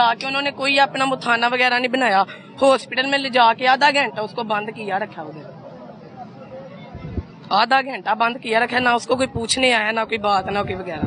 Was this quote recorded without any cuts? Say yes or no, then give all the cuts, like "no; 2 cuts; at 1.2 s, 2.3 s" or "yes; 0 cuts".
yes; 0 cuts